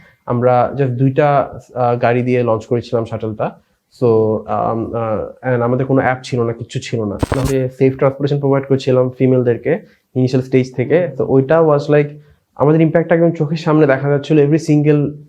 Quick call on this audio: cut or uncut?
cut